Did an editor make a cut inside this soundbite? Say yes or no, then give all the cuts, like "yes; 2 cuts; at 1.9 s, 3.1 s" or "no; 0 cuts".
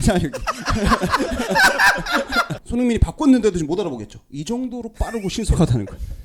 yes; 1 cut; at 2.5 s